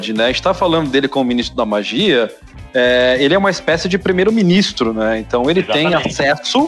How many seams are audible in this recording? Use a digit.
0